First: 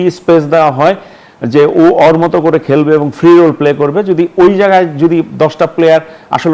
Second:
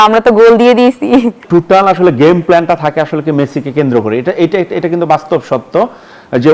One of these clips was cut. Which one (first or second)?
second